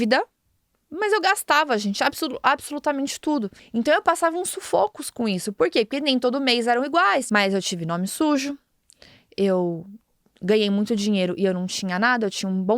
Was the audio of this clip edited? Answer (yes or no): yes